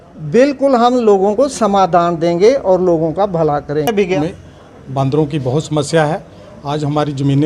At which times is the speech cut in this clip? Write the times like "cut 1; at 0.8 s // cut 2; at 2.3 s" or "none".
cut 1; at 4.2 s